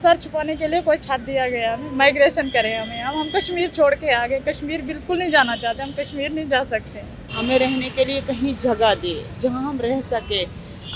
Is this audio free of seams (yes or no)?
no